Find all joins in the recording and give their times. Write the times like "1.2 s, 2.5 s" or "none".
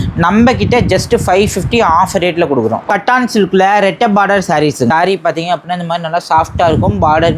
2.8 s, 4.9 s